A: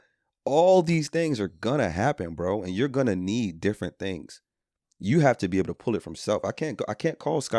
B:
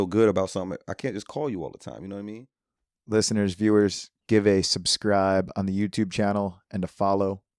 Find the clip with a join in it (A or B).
B